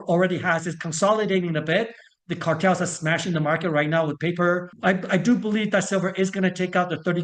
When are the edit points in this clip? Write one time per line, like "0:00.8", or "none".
0:04.7